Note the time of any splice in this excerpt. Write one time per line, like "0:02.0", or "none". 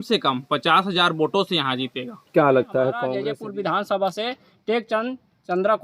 0:03.1

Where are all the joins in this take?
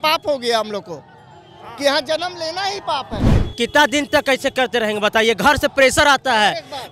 0:03.4

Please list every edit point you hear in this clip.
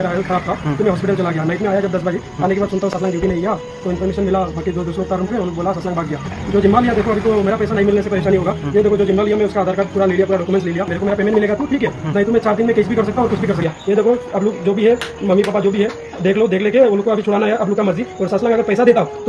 0:06.2
0:10.9
0:13.6

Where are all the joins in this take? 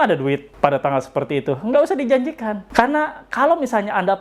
0:02.5

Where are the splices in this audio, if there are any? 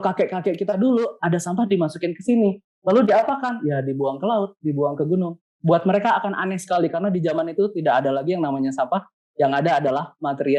none

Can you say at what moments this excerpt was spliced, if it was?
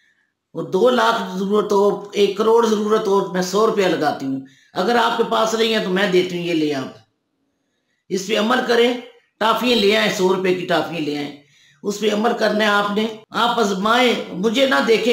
0:13.2

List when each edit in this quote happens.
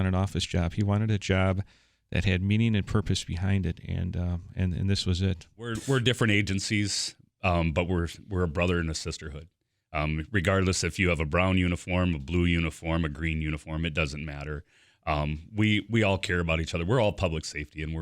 0:05.8

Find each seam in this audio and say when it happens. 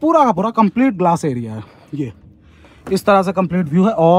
none

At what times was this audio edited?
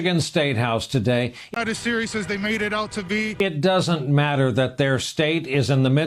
0:01.5
0:03.3

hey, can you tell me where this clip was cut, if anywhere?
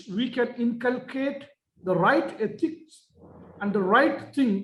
none

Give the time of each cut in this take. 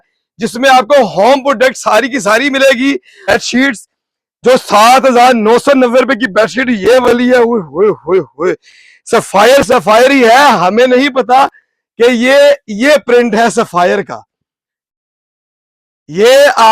0:03.3

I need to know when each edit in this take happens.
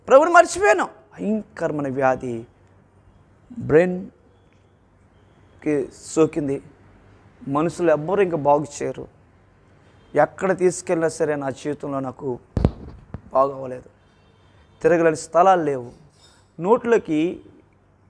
0:01.0

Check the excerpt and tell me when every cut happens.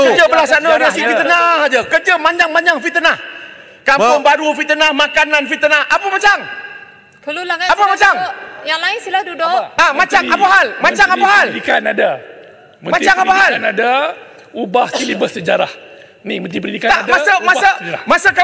none

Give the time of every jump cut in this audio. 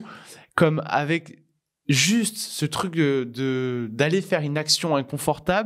none

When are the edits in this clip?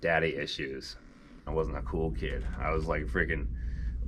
0:01.4

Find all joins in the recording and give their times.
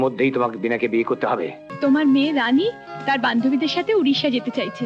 0:01.6

